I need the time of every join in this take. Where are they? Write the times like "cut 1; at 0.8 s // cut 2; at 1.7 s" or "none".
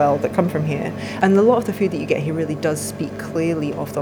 cut 1; at 1.0 s